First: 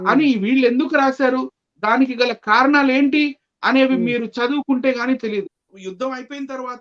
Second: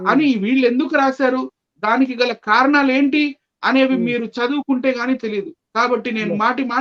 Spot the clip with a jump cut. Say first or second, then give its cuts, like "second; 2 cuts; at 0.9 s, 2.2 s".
first; 1 cut; at 5.6 s